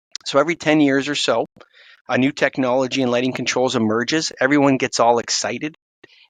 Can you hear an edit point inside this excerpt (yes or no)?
no